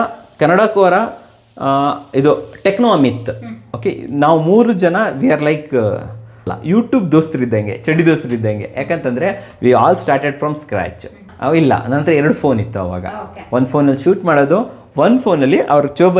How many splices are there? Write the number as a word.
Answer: two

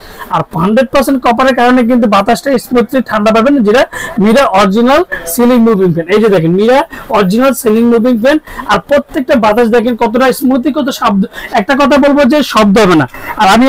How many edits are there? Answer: zero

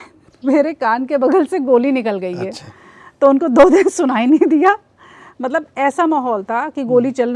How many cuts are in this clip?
zero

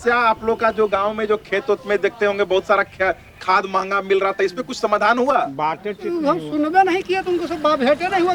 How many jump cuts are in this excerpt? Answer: zero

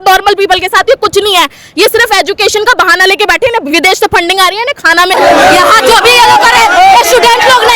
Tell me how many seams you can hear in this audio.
one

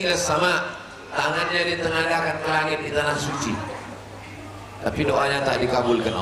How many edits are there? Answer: zero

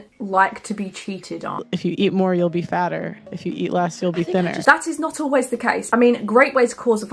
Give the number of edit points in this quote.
three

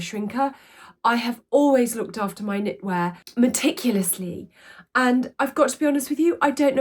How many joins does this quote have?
one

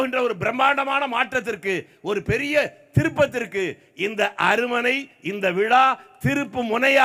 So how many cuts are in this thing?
zero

